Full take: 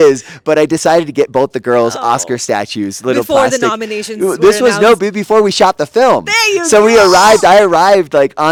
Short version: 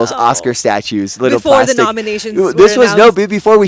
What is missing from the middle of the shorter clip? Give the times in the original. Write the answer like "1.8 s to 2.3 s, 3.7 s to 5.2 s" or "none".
none